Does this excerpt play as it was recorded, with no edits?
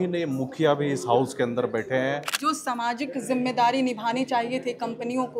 no; 1 cut; at 2.3 s

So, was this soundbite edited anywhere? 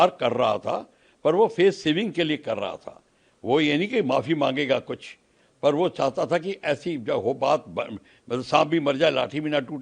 no; 0 cuts

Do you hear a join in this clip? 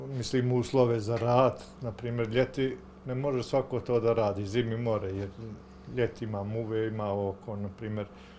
no; 0 cuts

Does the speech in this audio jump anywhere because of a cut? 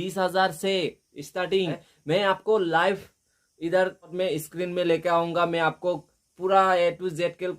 yes; 2 cuts; at 1.9 s, 4.1 s

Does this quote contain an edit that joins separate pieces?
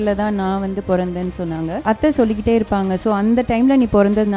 yes; 1 cut; at 1.8 s

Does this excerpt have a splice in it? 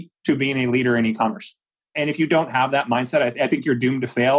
yes; 1 cut; at 1.9 s

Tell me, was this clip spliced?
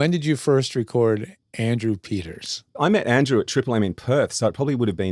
yes; 1 cut; at 2.7 s

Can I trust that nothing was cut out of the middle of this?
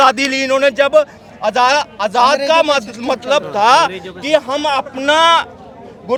yes; 0 cuts

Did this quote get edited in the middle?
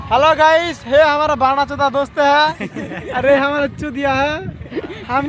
no; 0 cuts

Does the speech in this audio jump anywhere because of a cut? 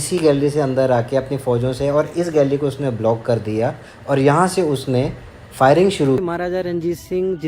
yes; 1 cut; at 6.2 s

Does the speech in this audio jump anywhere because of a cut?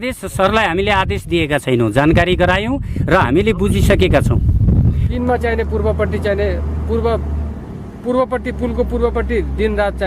yes; 1 cut; at 5.1 s

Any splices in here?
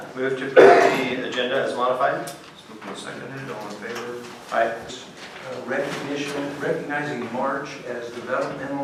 no; 0 cuts

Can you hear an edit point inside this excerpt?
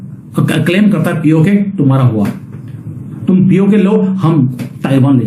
no; 0 cuts

